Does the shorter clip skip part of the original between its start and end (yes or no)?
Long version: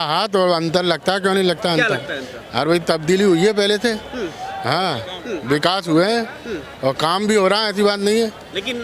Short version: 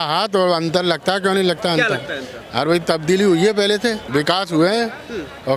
yes